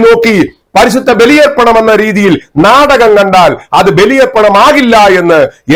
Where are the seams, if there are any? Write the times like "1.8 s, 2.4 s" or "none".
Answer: none